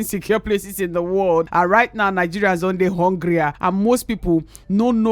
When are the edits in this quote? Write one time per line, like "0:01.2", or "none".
0:01.5
0:03.6